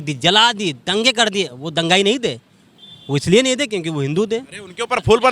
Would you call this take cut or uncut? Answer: uncut